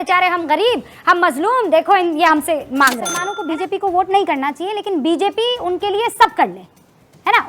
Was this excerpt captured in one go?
no; 1 cut; at 3.1 s

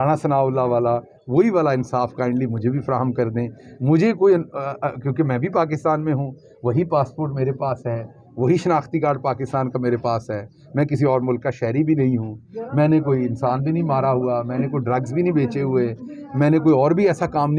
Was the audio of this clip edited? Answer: no; 0 cuts

